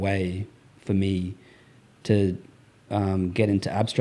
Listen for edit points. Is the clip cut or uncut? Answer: uncut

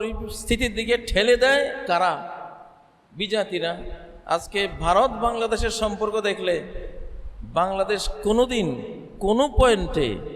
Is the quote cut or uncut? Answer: uncut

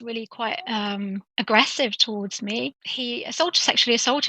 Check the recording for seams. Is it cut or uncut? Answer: cut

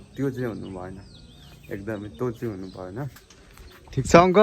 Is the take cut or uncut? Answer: cut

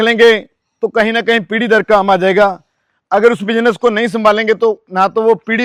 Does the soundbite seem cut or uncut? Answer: uncut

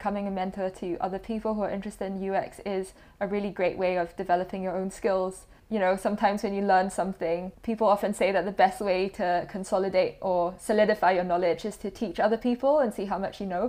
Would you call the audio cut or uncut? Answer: cut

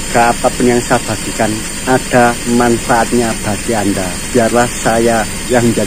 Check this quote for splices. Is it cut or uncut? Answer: uncut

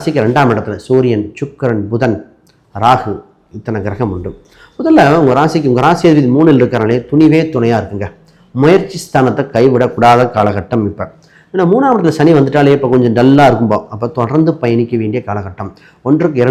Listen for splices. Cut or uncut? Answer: uncut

